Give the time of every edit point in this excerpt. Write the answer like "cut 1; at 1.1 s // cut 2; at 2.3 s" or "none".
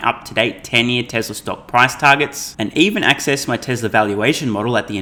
none

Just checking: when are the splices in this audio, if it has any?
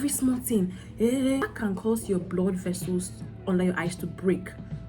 cut 1; at 1.4 s

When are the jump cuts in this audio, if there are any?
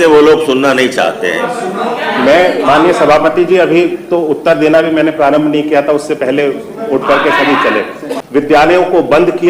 cut 1; at 8.2 s

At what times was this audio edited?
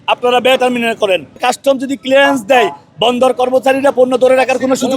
cut 1; at 1.4 s

